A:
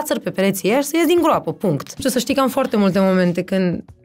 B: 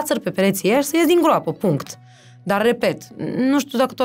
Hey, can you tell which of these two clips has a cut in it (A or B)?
A